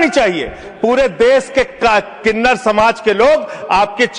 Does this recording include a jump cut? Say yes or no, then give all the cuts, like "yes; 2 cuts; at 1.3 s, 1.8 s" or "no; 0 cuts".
no; 0 cuts